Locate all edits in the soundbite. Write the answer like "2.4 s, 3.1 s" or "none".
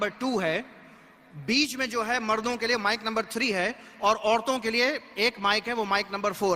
none